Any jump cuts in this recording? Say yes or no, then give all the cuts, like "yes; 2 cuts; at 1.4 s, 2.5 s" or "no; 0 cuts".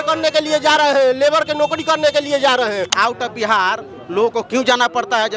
yes; 1 cut; at 2.9 s